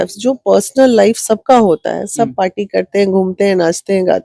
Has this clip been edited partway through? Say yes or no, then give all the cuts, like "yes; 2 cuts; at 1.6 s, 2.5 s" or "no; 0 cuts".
no; 0 cuts